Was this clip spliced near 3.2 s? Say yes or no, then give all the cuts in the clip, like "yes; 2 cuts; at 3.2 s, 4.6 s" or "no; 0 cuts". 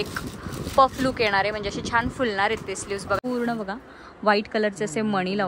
yes; 1 cut; at 3.2 s